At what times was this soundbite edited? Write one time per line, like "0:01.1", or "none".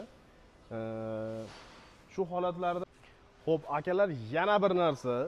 0:02.8